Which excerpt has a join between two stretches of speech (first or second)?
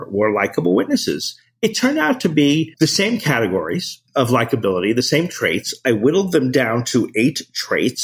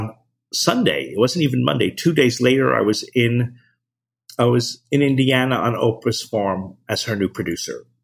first